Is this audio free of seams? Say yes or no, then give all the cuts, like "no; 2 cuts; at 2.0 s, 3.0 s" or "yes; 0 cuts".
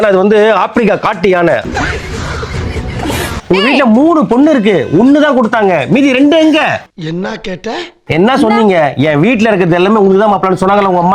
no; 2 cuts; at 3.4 s, 8.1 s